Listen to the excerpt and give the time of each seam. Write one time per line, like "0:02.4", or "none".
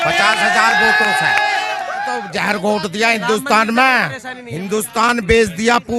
0:02.0